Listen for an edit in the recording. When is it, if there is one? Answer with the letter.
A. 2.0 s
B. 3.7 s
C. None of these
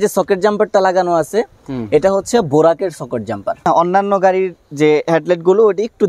B